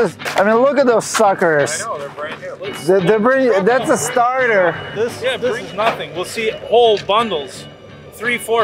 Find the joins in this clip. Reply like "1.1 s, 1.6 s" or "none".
5.4 s